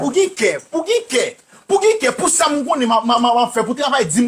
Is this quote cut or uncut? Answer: uncut